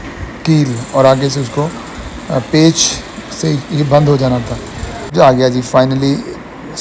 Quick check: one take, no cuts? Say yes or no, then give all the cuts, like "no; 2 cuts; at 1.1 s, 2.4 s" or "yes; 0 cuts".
no; 1 cut; at 5.1 s